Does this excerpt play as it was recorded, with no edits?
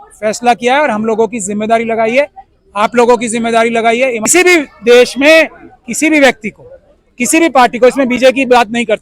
no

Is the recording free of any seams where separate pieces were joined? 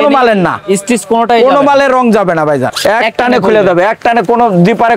no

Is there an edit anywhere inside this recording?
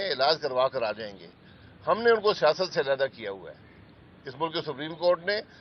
no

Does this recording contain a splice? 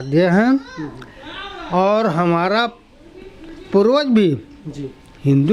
no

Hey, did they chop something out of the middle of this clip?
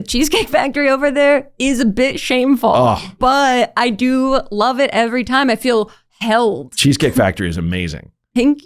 no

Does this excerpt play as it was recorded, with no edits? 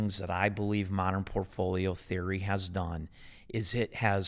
yes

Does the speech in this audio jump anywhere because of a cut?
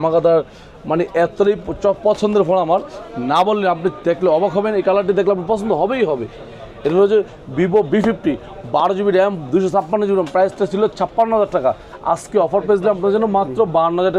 no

